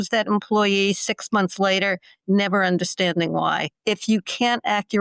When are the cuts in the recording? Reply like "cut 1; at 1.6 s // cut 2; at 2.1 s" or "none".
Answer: cut 1; at 3.7 s